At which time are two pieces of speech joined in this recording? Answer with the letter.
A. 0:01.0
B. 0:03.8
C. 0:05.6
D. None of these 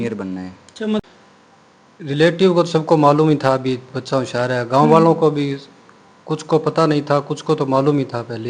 A